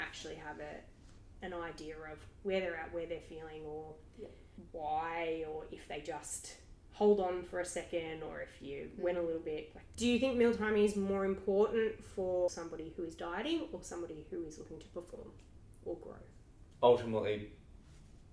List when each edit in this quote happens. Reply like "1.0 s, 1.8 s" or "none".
9.8 s, 12.6 s